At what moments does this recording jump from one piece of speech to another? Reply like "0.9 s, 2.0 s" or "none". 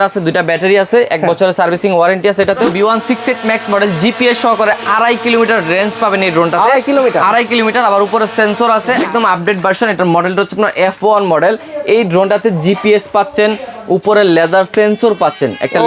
2.7 s, 9.0 s